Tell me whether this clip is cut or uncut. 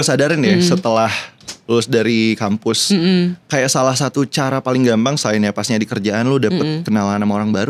uncut